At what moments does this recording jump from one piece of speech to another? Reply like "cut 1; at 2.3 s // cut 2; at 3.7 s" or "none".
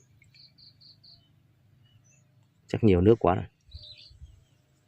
cut 1; at 3.7 s